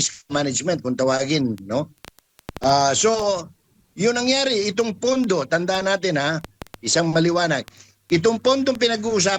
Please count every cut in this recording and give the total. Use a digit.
0